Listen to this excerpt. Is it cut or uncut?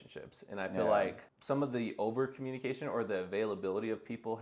cut